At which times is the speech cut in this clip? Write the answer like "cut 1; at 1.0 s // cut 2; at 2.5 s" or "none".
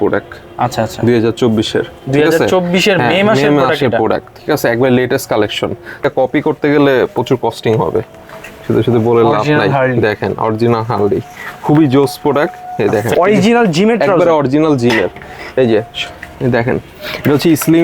cut 1; at 6.0 s // cut 2; at 13.1 s

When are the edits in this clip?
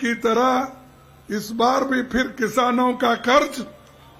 none

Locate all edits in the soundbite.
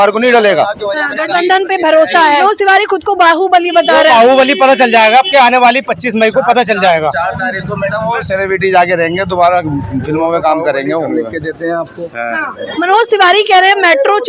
cut 1; at 2.4 s // cut 2; at 11.1 s // cut 3; at 12.6 s

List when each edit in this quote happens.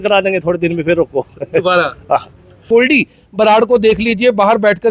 cut 1; at 2.6 s

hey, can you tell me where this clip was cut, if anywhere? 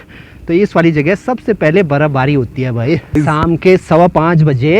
cut 1; at 3.1 s

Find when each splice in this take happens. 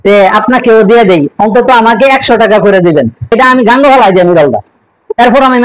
cut 1; at 3.3 s

